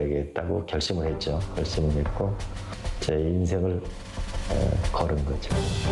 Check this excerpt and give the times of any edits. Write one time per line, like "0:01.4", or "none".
0:03.2